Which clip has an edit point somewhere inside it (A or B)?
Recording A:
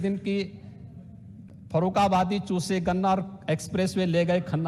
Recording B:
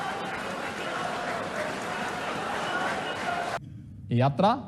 B